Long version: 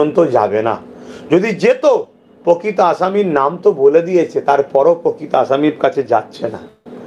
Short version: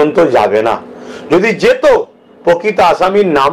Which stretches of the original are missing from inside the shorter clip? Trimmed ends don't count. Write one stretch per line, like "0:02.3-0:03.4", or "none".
none